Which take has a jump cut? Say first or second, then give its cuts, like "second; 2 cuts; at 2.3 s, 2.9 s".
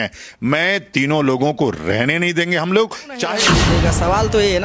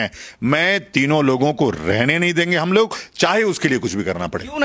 first; 1 cut; at 3.4 s